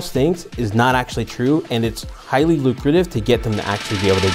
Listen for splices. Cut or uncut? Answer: uncut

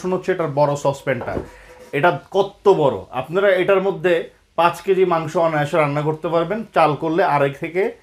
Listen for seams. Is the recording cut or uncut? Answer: uncut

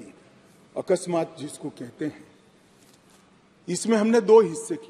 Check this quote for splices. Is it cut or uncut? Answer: uncut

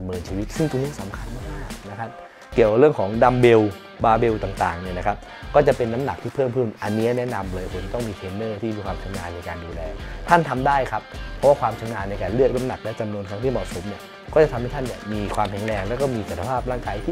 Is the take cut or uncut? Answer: cut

